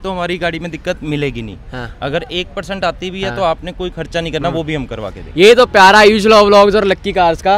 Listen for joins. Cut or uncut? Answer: uncut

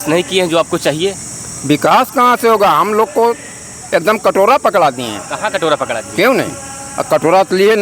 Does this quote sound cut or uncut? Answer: uncut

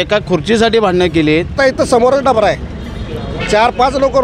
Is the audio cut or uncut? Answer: cut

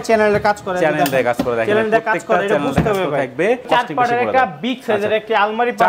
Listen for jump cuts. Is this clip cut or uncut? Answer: cut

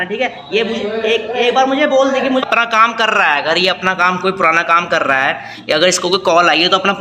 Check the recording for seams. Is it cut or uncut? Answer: cut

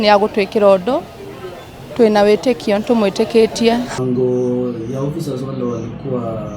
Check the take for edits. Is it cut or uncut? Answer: cut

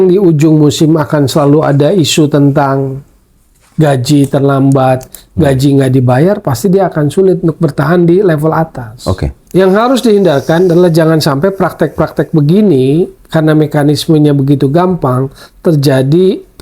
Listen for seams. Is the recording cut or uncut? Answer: cut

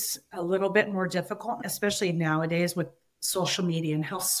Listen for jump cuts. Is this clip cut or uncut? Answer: cut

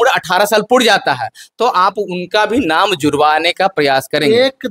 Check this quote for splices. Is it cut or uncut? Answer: uncut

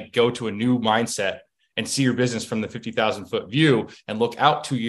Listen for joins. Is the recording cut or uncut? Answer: uncut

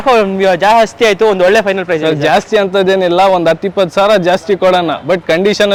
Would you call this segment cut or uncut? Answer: uncut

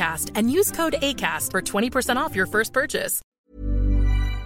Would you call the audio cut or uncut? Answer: cut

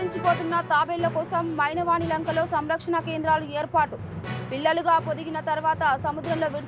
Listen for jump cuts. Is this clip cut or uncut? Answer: uncut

